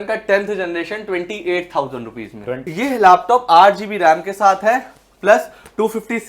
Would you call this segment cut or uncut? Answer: cut